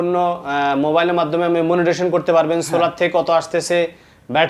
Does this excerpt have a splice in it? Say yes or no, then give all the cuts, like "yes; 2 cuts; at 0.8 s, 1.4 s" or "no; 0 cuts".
no; 0 cuts